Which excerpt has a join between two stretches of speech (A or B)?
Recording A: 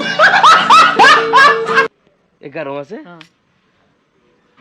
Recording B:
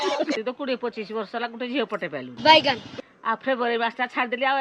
A